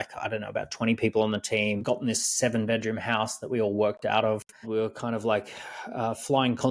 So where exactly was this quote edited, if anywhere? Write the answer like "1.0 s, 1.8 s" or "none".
1.8 s, 4.7 s